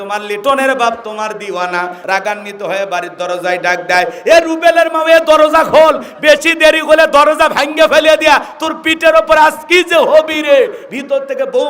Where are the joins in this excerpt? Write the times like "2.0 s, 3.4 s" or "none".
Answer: 2.0 s